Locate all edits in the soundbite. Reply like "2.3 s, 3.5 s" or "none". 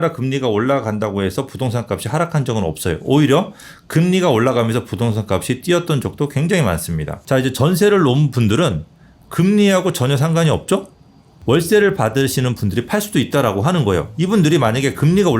7.1 s, 11.3 s